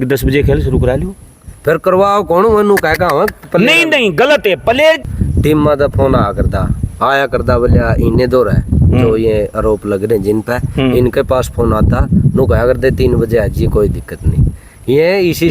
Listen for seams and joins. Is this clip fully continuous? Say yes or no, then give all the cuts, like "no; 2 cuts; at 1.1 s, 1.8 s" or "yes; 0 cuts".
no; 1 cut; at 5.1 s